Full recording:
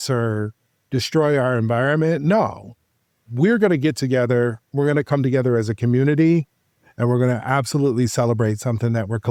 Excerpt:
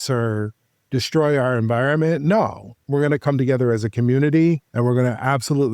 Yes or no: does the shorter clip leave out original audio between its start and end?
yes